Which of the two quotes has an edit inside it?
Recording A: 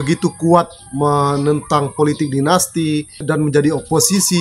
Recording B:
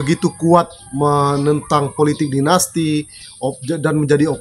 A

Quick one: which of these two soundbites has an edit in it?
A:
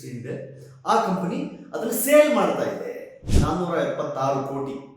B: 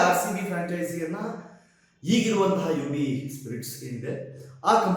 A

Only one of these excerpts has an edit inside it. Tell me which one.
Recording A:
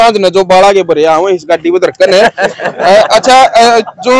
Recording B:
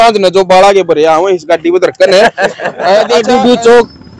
B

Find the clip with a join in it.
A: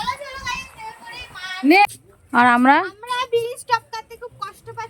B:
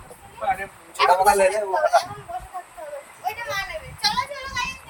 A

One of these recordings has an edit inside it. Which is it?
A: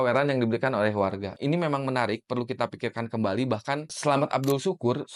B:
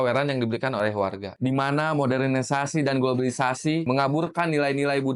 B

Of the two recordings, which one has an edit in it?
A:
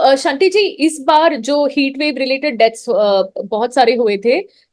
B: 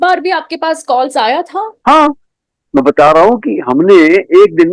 B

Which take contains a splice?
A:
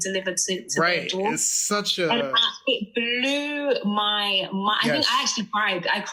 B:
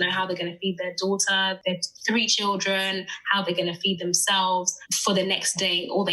B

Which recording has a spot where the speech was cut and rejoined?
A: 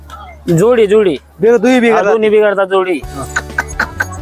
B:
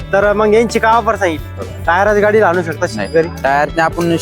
B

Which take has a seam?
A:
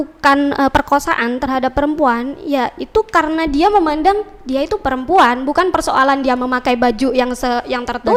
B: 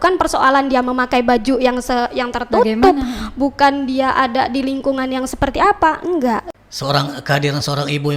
B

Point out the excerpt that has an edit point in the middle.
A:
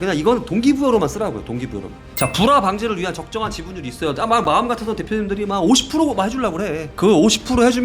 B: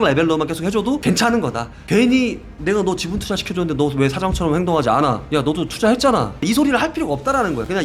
A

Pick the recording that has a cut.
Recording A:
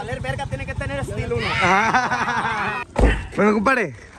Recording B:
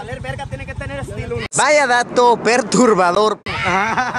A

